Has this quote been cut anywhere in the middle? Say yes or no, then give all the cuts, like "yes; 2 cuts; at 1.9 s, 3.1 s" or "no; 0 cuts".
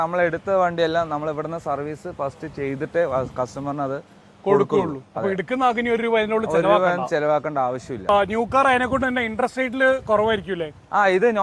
yes; 1 cut; at 8.0 s